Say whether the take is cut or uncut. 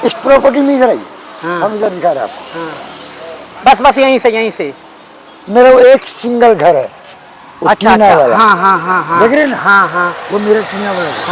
uncut